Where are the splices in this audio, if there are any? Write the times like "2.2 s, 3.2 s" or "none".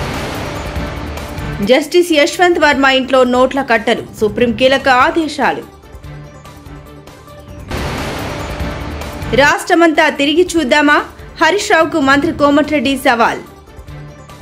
0.9 s